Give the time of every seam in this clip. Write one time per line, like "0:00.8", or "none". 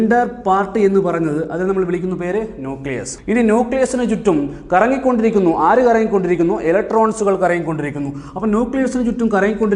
0:03.1